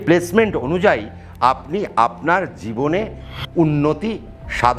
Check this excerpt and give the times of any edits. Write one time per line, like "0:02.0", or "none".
none